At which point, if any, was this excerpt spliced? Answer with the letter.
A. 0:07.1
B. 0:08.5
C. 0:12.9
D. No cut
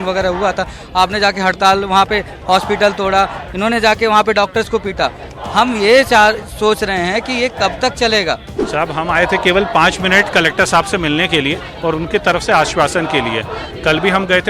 B